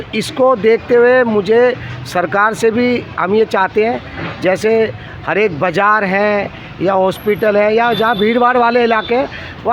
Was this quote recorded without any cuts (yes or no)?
yes